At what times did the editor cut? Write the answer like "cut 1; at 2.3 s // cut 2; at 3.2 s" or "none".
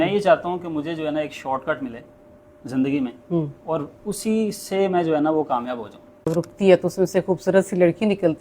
cut 1; at 6.3 s